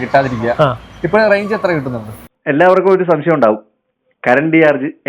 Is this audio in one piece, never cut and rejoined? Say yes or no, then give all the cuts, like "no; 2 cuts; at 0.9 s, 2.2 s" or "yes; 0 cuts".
no; 1 cut; at 2.2 s